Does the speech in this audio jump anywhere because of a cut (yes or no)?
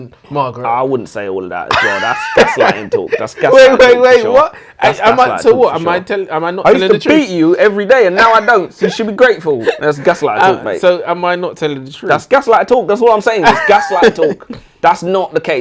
no